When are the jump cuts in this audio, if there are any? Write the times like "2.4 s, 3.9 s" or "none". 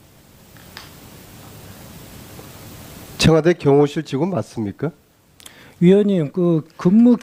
5.6 s